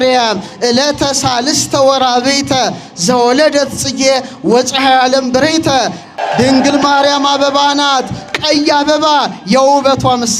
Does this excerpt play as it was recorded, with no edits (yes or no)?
no